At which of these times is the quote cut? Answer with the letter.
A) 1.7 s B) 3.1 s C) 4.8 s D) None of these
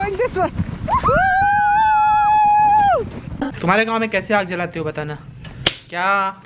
B